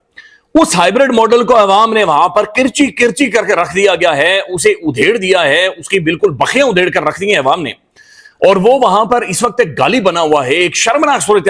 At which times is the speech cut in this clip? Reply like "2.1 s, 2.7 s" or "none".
none